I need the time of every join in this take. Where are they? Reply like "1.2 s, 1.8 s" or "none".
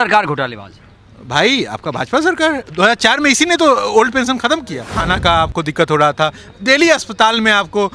4.9 s